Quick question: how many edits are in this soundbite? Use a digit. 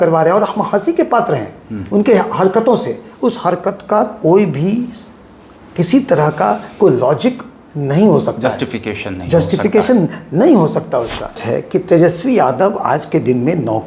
1